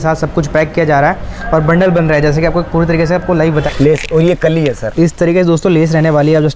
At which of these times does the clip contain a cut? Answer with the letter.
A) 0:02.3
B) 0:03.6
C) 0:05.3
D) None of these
B